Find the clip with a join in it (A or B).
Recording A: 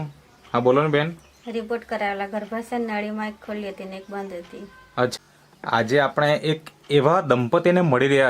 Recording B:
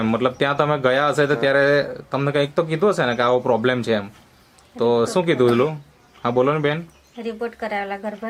A